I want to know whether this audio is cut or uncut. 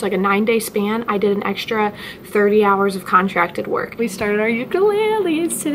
cut